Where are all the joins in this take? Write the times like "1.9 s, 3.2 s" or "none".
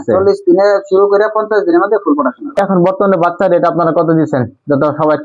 2.6 s